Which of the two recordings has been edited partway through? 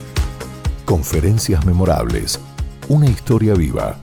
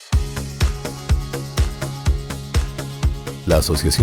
second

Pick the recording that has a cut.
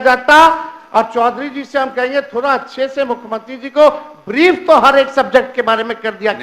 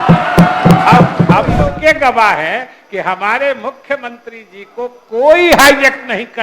second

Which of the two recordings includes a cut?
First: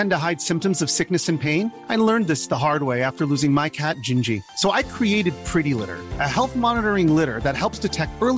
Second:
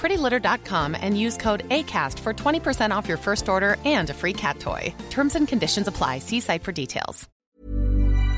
second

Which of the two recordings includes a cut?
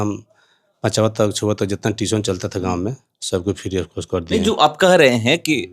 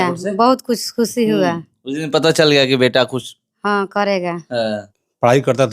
second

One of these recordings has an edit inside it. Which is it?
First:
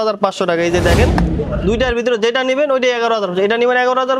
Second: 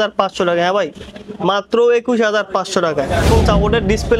second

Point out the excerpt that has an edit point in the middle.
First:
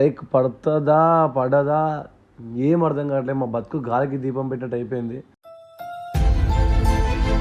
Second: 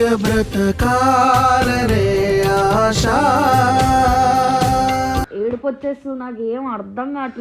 second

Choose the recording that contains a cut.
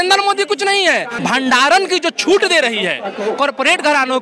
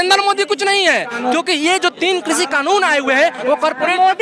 first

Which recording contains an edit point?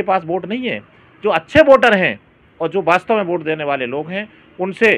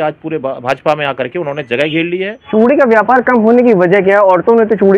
second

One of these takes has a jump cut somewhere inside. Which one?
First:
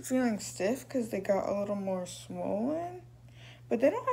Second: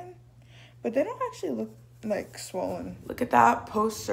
second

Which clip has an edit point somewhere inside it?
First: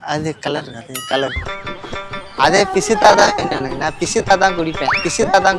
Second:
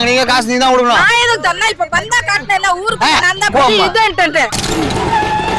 first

